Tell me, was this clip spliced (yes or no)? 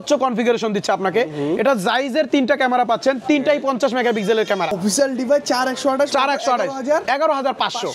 yes